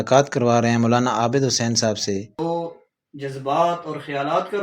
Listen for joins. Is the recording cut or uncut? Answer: cut